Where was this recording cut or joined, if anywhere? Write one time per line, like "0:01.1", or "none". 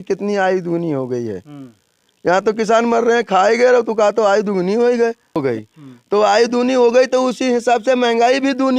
0:05.4